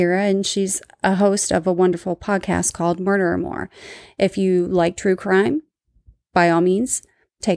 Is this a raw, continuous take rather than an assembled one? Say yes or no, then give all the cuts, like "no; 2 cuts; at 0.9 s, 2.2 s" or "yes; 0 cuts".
yes; 0 cuts